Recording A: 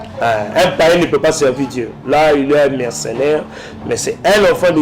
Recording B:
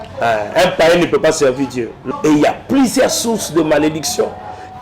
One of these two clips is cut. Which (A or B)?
B